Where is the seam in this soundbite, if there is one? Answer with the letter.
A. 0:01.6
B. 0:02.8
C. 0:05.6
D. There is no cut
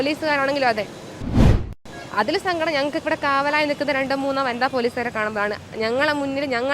A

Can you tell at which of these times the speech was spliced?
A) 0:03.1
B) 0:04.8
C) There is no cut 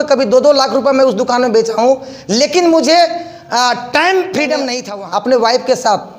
B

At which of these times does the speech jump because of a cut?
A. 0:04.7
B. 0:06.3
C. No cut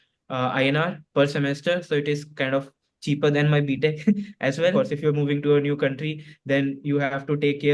A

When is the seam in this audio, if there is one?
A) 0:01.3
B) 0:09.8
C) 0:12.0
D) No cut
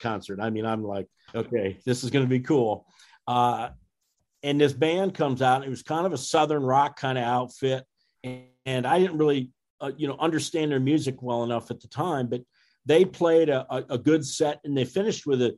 A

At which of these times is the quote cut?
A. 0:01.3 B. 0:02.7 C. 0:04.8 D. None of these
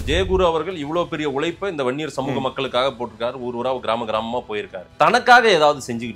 C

